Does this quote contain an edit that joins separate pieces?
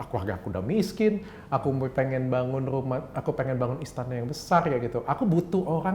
no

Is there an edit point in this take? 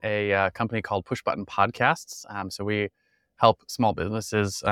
no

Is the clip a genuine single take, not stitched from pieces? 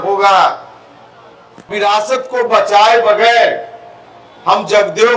no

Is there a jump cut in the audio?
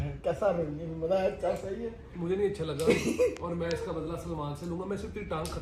no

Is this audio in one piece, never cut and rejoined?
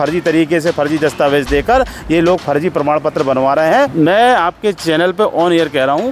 no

